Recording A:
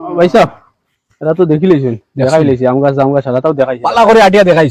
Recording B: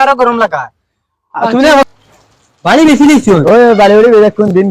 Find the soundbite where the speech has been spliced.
B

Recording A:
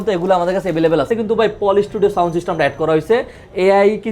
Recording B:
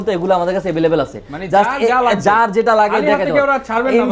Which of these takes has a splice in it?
A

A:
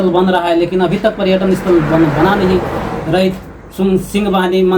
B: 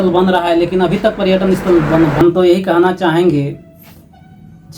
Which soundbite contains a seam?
B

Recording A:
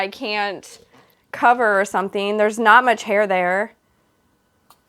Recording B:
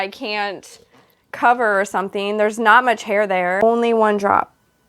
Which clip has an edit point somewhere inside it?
B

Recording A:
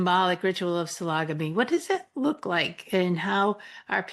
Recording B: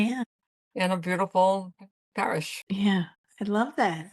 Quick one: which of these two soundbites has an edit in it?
B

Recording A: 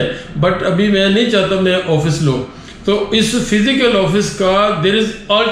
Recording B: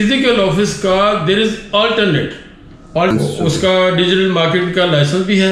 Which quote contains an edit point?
B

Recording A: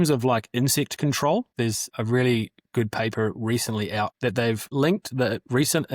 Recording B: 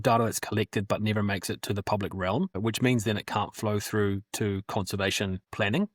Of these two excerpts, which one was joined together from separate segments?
A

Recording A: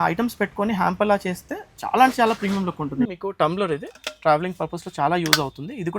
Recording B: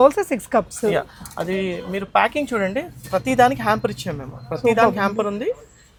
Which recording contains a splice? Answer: A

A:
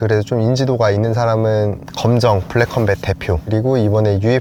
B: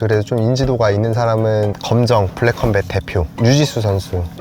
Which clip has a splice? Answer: B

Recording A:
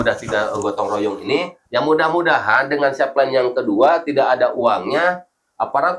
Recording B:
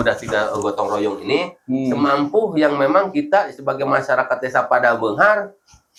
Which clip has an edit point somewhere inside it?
A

